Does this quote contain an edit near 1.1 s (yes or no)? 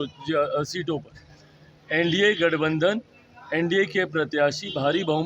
no